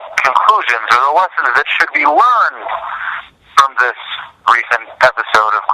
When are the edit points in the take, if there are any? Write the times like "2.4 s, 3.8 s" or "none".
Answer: none